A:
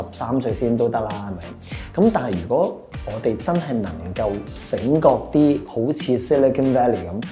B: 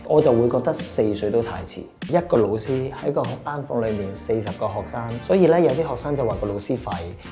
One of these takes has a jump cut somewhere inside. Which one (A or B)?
B